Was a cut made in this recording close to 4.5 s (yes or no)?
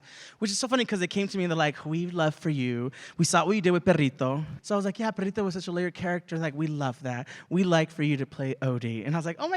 yes